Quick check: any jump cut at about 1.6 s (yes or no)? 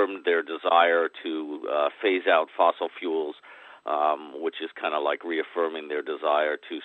no